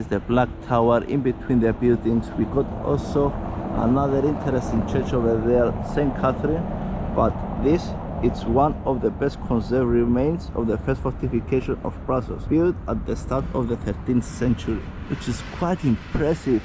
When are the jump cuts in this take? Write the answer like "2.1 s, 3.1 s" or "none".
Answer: none